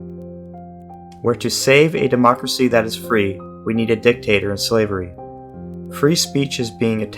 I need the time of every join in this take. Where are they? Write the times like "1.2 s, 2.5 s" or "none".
1.2 s